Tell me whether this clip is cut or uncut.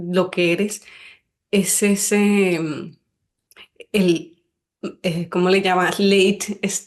uncut